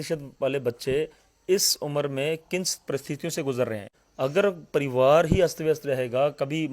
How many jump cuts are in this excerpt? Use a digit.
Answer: 1